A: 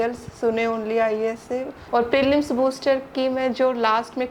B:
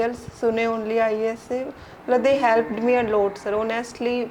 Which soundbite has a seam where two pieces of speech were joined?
A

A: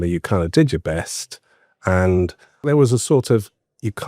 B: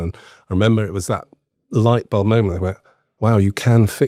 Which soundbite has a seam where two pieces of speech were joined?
A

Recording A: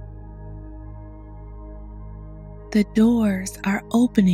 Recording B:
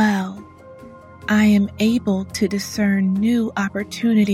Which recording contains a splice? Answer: A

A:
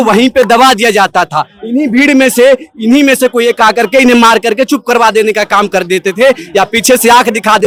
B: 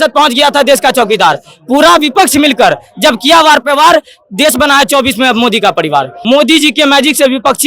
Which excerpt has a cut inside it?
B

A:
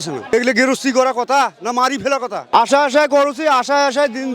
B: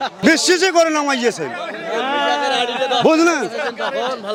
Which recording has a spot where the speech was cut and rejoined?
A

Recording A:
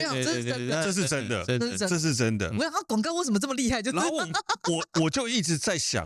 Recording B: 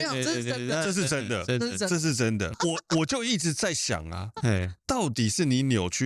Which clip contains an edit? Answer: B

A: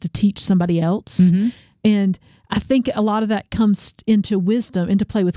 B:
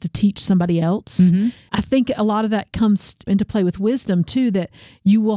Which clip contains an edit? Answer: B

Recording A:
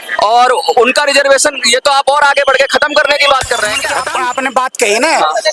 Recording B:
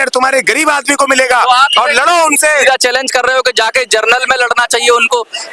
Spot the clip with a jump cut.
A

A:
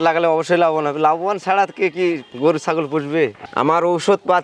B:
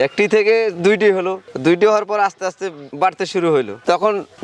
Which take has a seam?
A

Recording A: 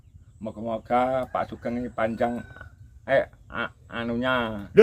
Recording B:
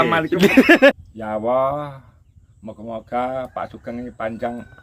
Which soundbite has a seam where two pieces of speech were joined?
B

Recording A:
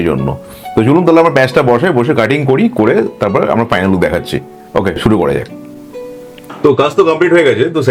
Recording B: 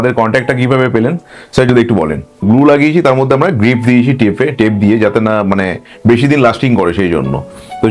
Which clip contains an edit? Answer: B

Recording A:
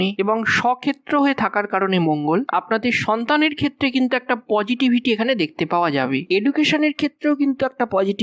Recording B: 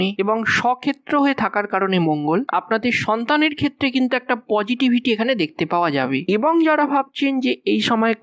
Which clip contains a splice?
A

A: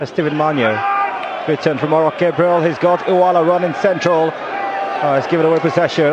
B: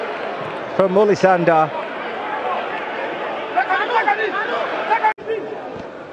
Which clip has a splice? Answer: B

